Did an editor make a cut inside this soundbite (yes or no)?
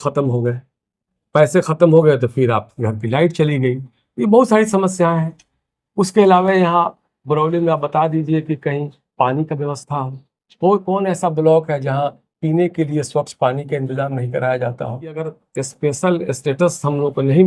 yes